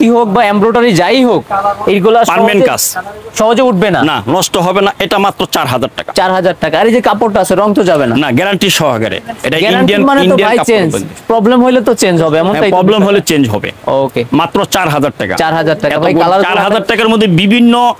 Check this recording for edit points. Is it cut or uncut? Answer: uncut